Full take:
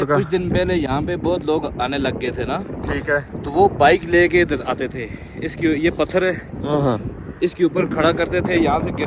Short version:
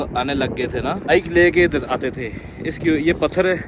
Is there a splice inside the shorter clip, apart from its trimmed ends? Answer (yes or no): yes